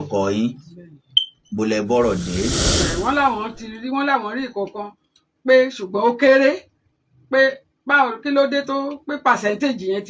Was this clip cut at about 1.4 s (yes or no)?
no